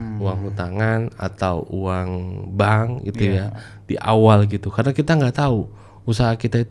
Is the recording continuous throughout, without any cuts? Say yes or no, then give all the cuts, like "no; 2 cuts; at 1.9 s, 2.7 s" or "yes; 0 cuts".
yes; 0 cuts